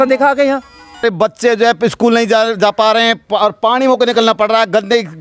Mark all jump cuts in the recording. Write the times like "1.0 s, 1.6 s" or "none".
1.0 s